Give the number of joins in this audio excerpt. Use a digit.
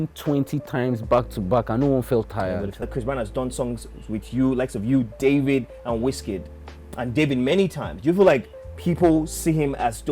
1